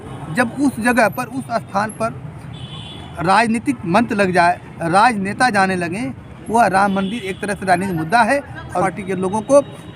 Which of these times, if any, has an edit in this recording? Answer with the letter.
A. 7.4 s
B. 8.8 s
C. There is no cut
B